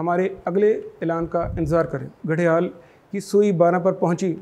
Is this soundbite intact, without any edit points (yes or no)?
no